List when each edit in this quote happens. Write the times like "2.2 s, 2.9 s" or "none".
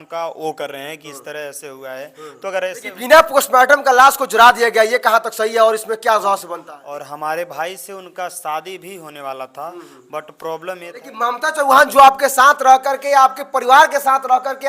2.9 s, 6.7 s, 11.1 s